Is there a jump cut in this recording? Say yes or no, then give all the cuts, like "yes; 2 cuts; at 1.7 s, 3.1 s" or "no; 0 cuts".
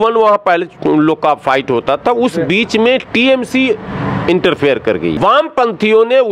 yes; 1 cut; at 5.2 s